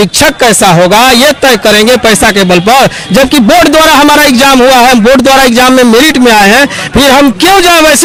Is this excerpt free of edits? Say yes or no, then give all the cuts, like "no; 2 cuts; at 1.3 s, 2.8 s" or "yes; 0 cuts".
yes; 0 cuts